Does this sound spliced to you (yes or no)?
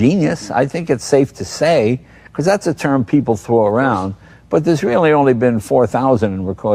no